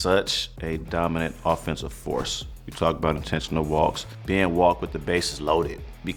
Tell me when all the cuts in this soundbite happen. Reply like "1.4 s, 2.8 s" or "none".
none